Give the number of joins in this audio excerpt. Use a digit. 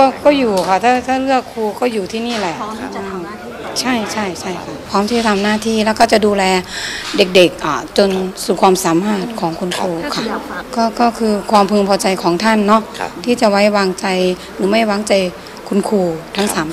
1